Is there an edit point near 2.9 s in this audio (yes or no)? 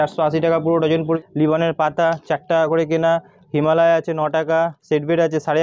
no